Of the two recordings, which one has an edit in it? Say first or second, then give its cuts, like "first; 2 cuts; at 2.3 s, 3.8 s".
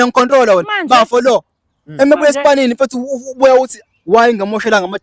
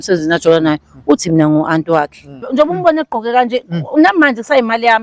second; 1 cut; at 2.5 s